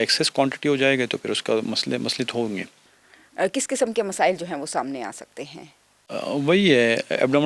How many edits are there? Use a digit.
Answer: 0